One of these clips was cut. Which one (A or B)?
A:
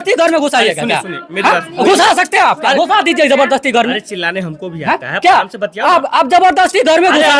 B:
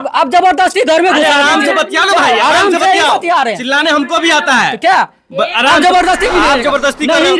B